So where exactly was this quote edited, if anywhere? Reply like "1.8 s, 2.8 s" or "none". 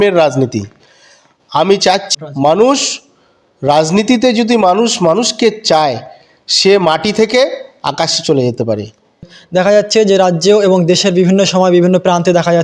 2.1 s, 9.2 s